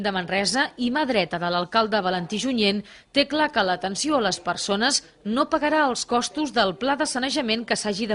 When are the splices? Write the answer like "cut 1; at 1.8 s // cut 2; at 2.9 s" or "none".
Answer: cut 1; at 1.1 s